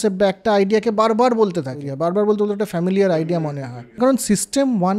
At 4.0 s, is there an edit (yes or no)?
yes